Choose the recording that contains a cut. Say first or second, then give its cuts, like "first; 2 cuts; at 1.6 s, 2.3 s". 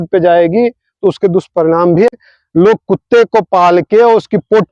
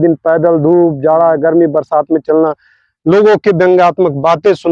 first; 1 cut; at 2.1 s